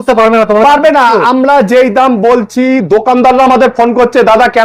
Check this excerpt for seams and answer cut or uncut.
uncut